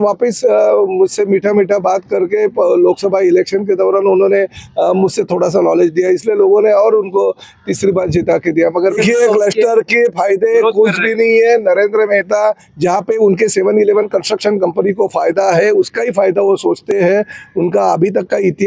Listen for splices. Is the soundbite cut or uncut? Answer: cut